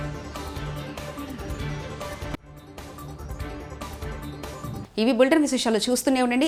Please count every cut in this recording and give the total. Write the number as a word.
zero